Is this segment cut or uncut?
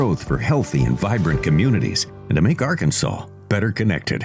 uncut